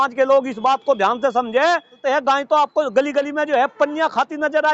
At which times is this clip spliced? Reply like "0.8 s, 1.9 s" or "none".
2.0 s